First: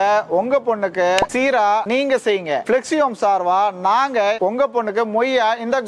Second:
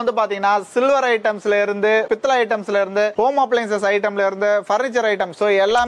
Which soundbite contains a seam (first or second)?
first